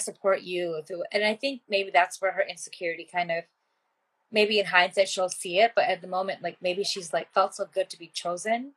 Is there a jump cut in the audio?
no; 0 cuts

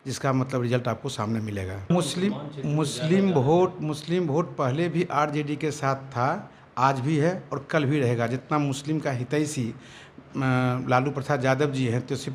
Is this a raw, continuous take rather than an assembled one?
no; 1 cut; at 1.9 s

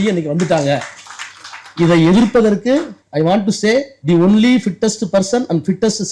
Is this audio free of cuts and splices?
no; 2 cuts; at 3.0 s, 3.9 s

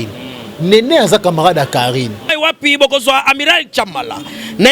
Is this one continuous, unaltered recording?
no; 1 cut; at 2.2 s

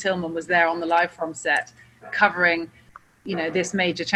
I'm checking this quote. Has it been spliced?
no; 0 cuts

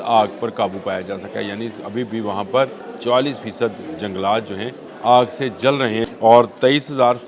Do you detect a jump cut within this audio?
yes; 3 cuts; at 2.9 s, 4.8 s, 6.1 s

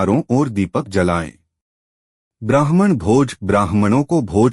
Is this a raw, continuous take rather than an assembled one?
no; 1 cut; at 2.2 s

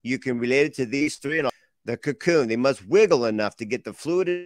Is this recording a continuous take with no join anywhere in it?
no; 1 cut; at 1.5 s

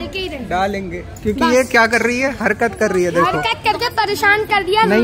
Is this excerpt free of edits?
yes; 0 cuts

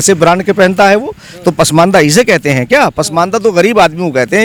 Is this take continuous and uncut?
yes; 0 cuts

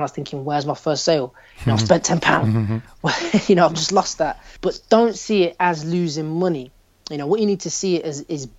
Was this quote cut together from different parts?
yes; 1 cut; at 4.5 s

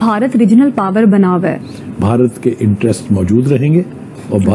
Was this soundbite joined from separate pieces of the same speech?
yes; 1 cut; at 1.6 s

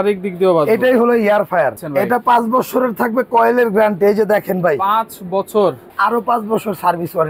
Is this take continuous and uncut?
no; 2 cuts; at 1.8 s, 5.9 s

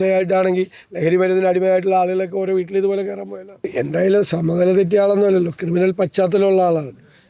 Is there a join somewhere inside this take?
yes; 1 cut; at 3.7 s

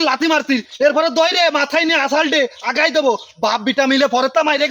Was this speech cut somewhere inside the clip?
no; 0 cuts

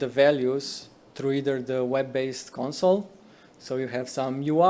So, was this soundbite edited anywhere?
no; 0 cuts

